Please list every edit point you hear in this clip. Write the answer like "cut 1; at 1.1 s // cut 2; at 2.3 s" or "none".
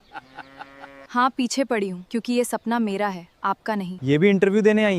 cut 1; at 1.0 s // cut 2; at 2.0 s // cut 3; at 3.9 s